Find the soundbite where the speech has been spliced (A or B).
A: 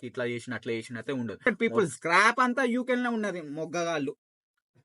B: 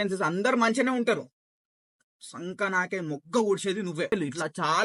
A